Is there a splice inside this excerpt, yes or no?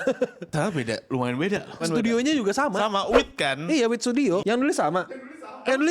yes